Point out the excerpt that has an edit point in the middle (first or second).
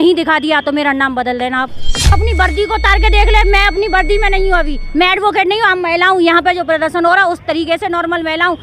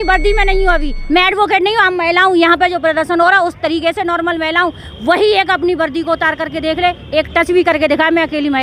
first